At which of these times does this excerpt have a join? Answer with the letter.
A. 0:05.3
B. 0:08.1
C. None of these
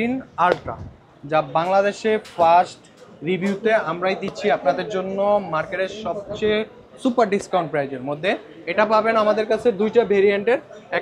C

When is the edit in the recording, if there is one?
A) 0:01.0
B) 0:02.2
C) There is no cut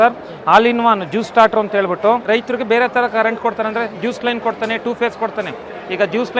B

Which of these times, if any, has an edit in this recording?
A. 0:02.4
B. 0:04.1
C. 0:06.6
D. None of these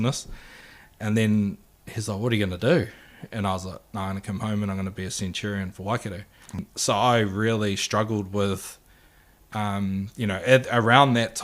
C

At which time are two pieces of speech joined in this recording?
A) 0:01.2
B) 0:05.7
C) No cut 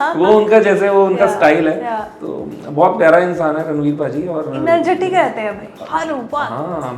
B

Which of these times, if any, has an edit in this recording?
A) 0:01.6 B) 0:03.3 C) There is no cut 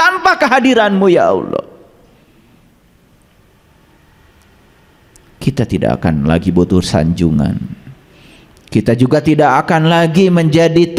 C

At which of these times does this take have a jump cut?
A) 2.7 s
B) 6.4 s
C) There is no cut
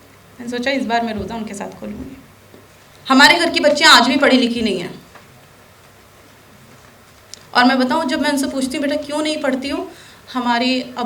A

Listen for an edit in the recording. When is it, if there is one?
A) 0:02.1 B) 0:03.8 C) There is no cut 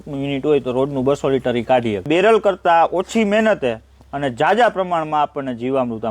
A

